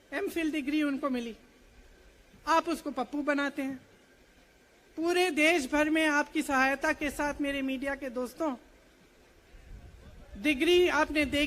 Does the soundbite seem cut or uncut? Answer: uncut